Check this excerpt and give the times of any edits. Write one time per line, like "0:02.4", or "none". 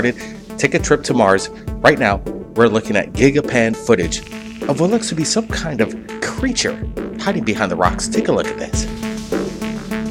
0:04.8